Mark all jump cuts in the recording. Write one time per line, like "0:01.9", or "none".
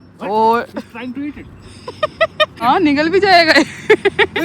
0:02.6